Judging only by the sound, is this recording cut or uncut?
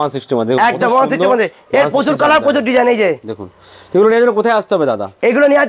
uncut